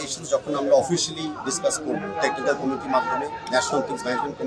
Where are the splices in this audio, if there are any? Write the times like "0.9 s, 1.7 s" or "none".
none

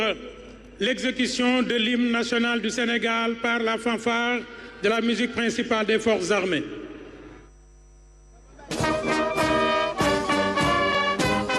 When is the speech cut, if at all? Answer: 3.6 s

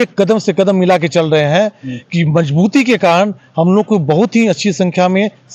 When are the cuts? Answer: none

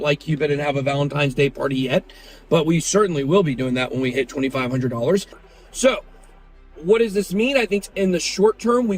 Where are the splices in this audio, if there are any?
5.4 s

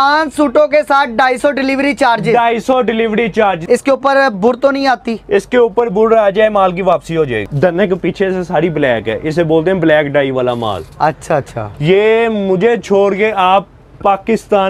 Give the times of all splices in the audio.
3.6 s, 7.4 s

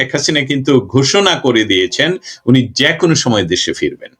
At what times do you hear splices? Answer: none

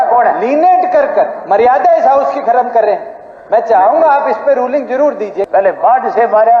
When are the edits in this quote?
5.5 s

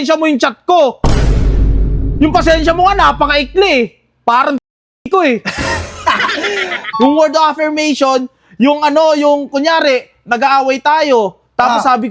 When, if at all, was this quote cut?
6.9 s

